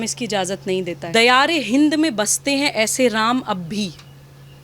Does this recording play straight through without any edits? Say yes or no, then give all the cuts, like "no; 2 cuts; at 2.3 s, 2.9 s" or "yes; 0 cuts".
no; 1 cut; at 1.0 s